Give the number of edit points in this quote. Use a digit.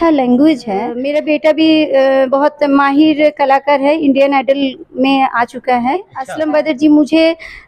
2